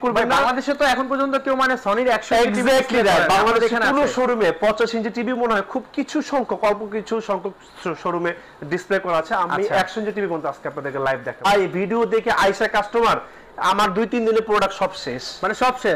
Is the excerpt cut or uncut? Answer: cut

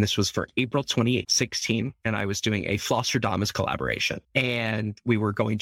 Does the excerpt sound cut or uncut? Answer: cut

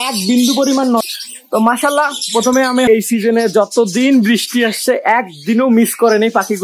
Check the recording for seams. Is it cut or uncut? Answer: cut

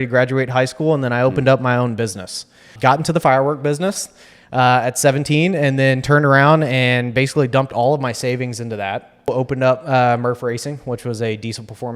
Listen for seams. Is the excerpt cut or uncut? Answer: cut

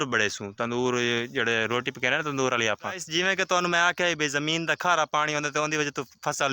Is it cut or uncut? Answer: cut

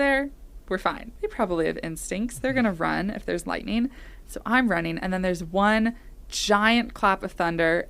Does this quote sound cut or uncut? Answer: cut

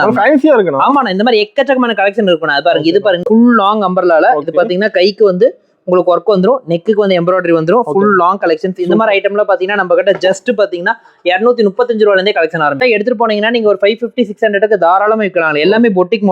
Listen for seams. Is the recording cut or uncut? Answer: cut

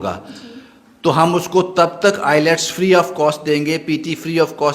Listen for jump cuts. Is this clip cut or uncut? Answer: uncut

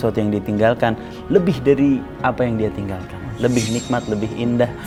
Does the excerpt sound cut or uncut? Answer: uncut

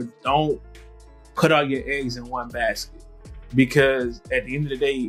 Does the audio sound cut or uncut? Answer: uncut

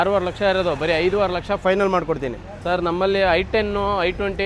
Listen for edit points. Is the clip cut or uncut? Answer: cut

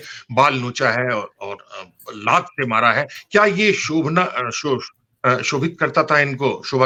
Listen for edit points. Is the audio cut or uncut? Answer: uncut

